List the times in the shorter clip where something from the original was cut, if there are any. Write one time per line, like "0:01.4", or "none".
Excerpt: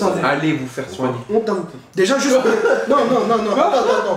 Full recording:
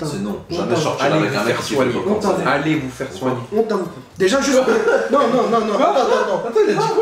none